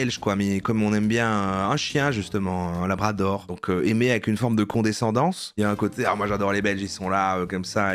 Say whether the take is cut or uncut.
uncut